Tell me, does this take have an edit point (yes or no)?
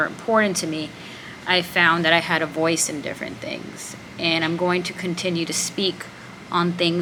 no